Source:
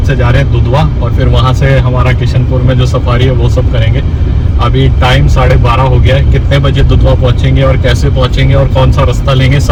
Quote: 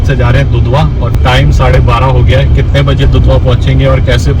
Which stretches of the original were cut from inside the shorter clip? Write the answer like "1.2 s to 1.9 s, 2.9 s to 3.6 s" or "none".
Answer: 1.2 s to 4.9 s